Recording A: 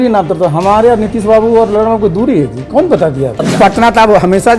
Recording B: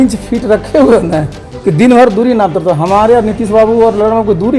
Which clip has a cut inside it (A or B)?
A